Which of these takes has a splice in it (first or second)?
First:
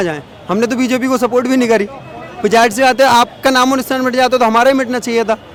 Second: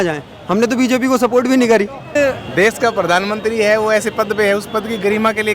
second